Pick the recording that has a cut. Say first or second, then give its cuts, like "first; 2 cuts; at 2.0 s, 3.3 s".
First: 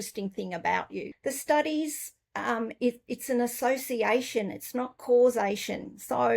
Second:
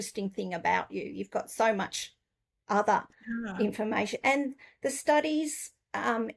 first; 1 cut; at 1.1 s